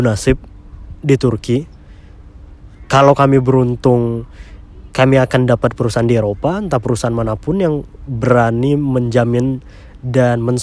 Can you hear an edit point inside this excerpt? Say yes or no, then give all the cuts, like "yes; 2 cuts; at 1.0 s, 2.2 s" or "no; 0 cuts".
no; 0 cuts